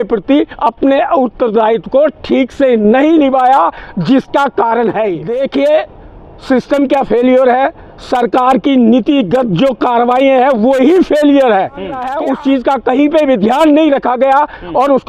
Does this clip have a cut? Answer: yes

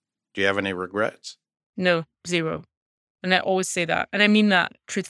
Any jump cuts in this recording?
no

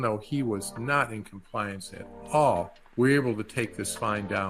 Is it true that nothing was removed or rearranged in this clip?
no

